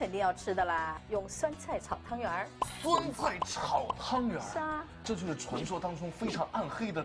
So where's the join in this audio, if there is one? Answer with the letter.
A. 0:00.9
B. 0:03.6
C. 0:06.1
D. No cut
A